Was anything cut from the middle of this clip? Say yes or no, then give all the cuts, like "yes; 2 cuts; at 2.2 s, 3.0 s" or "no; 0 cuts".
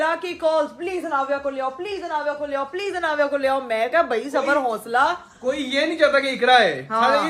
no; 0 cuts